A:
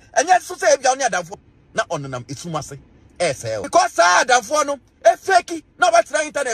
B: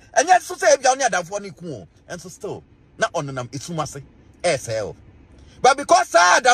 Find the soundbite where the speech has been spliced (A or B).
A